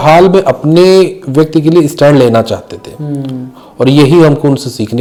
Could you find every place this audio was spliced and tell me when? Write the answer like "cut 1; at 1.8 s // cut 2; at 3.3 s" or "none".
none